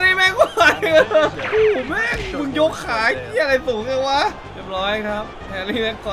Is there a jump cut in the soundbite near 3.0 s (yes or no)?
no